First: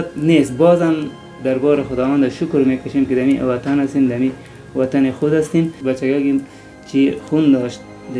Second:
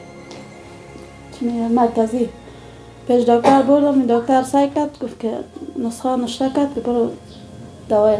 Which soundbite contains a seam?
first; 1 cut; at 5.8 s

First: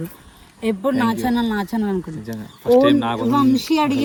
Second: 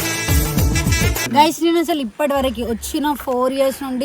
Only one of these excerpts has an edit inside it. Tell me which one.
second; 1 cut; at 1.2 s

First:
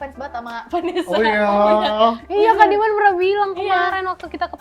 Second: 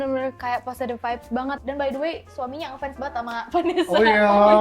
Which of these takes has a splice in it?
second; 1 cut; at 1.5 s

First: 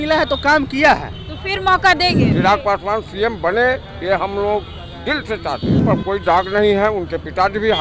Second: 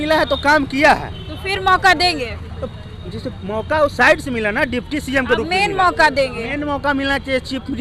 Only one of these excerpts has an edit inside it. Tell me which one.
first; 2 cuts; at 2.3 s, 5.8 s

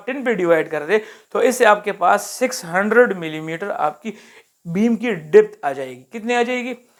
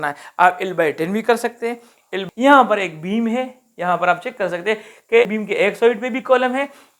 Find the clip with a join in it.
second; 1 cut; at 2.1 s

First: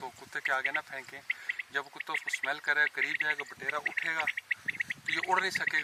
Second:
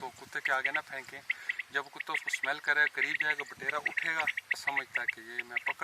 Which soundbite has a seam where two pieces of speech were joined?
second; 1 cut; at 4.6 s

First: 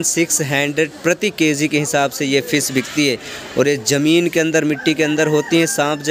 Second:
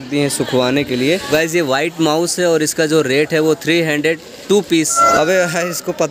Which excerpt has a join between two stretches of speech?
second; 2 cuts; at 1.3 s, 5.0 s

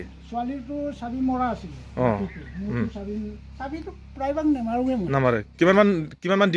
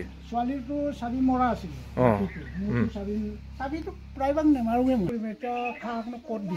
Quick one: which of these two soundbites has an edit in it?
second; 1 cut; at 5.1 s

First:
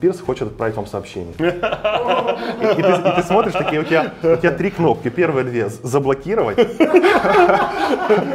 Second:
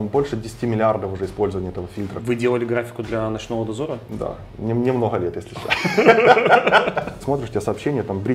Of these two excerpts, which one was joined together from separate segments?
second; 2 cuts; at 2.1 s, 7.1 s

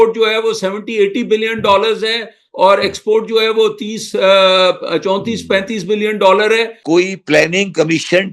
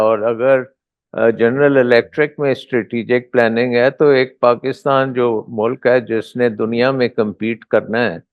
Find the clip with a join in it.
first; 1 cut; at 6.7 s

